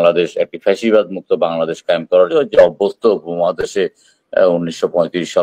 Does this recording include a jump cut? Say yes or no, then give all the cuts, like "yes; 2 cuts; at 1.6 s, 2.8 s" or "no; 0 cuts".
yes; 1 cut; at 2.3 s